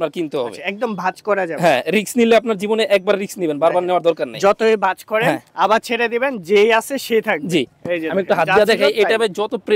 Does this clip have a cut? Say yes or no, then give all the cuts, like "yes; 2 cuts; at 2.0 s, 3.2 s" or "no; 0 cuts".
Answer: no; 0 cuts